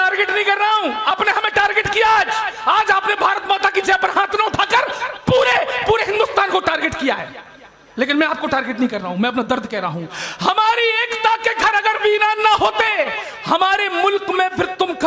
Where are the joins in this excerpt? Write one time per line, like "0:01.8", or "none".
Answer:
0:01.1